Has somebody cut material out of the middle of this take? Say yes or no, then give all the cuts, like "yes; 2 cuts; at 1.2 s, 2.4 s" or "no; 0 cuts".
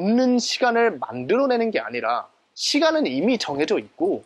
no; 0 cuts